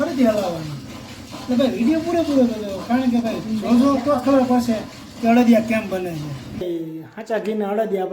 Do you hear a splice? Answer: yes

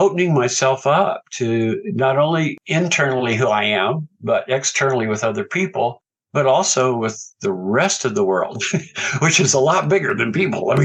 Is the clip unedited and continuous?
yes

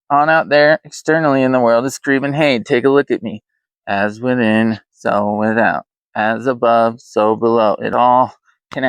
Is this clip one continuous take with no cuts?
no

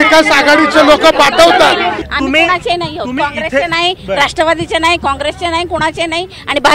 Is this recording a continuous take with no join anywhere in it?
no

